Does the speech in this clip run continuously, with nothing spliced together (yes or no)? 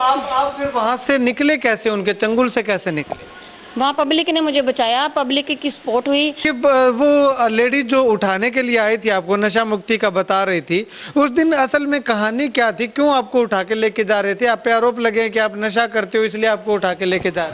no